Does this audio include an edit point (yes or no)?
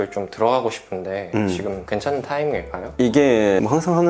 no